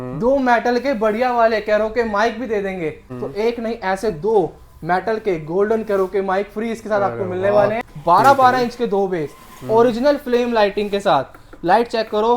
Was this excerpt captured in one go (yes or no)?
no